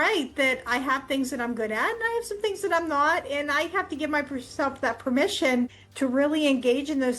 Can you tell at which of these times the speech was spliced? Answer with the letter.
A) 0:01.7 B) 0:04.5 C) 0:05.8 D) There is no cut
C